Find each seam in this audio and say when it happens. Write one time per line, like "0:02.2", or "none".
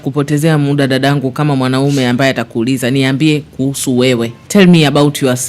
0:04.4